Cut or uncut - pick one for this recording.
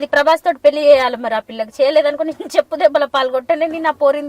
uncut